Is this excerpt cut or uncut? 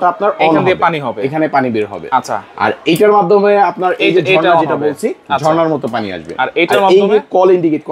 uncut